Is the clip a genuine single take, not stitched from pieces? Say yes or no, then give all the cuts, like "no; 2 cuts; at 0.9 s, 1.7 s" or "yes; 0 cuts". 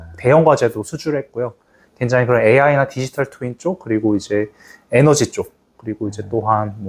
yes; 0 cuts